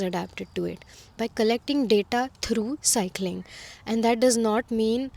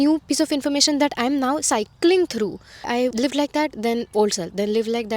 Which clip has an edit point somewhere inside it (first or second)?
second